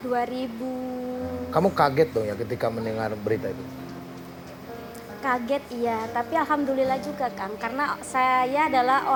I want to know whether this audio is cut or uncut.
uncut